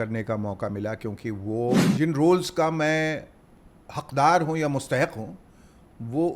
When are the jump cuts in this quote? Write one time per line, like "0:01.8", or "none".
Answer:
0:01.9